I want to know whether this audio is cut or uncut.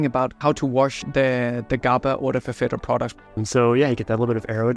cut